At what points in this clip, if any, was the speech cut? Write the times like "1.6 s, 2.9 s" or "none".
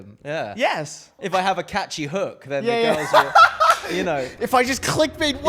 1.2 s